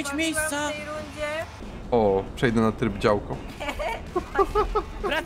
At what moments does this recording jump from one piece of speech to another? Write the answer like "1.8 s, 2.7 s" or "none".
1.7 s